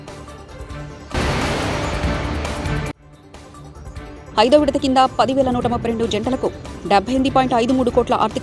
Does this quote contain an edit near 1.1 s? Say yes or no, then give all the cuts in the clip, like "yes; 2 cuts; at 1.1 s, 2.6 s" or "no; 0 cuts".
yes; 2 cuts; at 1.1 s, 3.0 s